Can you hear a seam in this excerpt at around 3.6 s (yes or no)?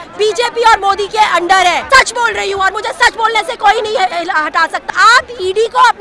no